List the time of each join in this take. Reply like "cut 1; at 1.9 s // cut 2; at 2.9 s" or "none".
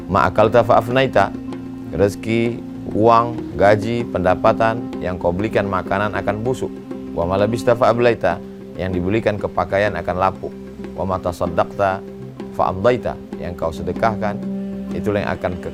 none